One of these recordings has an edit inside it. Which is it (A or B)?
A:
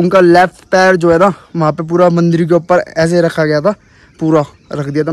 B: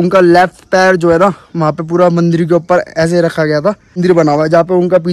B